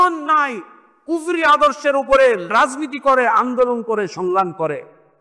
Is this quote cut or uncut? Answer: cut